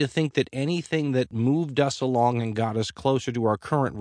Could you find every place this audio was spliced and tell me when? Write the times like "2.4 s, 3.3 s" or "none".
1.3 s